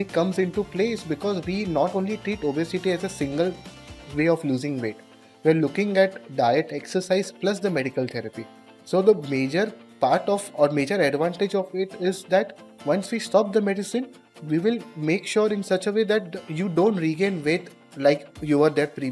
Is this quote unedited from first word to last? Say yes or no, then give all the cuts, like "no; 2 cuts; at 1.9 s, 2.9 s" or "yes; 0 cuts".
yes; 0 cuts